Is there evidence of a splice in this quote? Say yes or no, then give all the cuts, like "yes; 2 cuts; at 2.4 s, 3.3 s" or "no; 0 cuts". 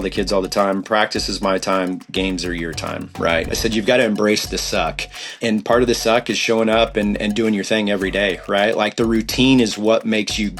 yes; 2 cuts; at 3.5 s, 5.4 s